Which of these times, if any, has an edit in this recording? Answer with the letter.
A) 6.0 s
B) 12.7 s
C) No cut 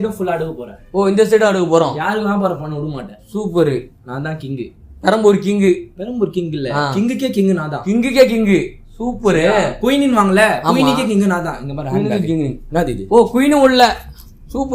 C